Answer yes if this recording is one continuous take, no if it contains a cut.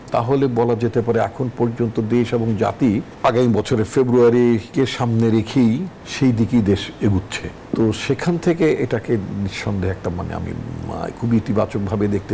no